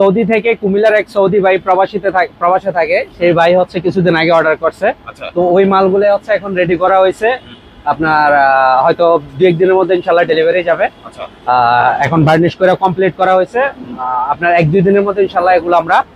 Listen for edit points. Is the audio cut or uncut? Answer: uncut